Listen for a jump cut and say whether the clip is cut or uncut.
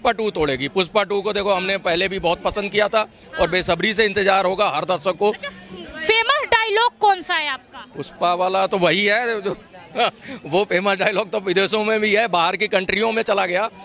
uncut